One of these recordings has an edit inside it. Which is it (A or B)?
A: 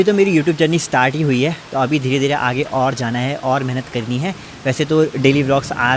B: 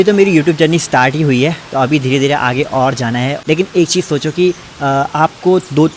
B